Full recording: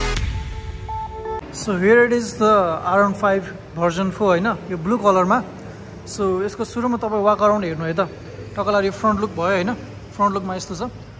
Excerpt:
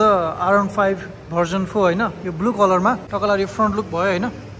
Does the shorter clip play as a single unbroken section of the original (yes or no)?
no